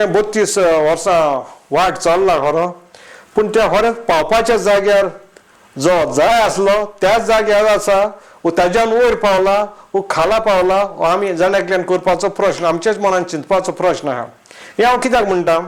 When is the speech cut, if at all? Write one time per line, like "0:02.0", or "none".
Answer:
none